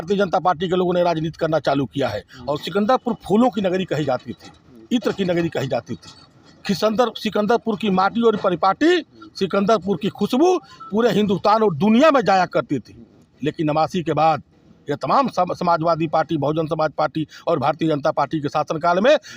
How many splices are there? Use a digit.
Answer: 1